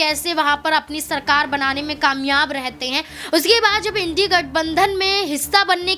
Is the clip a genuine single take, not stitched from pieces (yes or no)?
yes